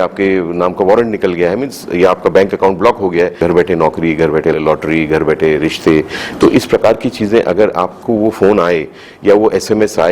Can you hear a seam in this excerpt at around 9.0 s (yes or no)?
no